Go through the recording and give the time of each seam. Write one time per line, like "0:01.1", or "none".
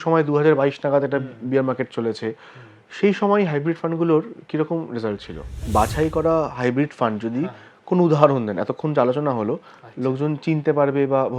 0:05.7